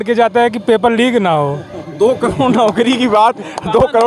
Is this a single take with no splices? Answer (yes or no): yes